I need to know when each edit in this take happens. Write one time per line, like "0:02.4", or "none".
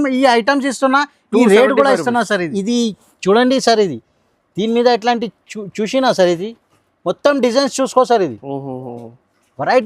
0:02.5